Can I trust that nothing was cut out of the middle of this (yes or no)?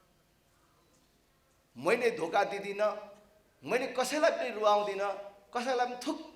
yes